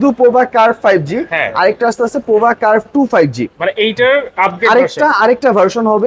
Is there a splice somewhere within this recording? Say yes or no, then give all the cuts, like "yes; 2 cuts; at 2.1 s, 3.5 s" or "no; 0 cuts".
no; 0 cuts